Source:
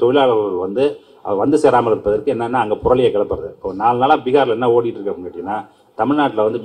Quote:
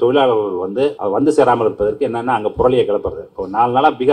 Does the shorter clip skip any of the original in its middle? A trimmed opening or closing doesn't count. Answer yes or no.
yes